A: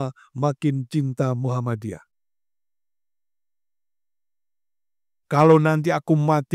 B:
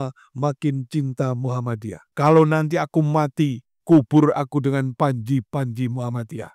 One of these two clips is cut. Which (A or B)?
B